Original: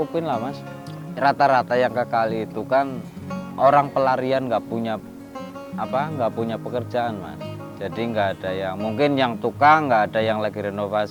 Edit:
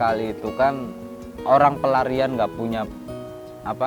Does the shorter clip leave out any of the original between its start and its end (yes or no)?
no